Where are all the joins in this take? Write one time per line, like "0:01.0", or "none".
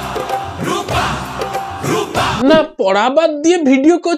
0:02.4